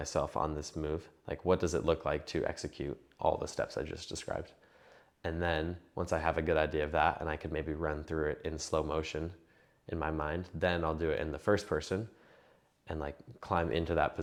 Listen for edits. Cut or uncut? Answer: uncut